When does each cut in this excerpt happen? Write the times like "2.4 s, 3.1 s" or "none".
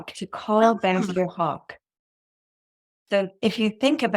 none